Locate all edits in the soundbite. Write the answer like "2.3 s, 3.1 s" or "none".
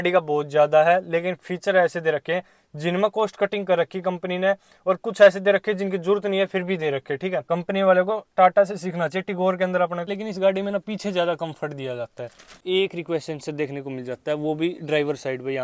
7.4 s, 10.0 s, 12.5 s